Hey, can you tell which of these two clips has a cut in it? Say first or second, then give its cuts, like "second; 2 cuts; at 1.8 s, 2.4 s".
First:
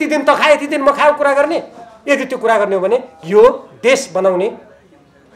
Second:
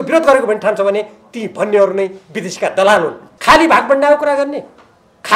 second; 1 cut; at 3.3 s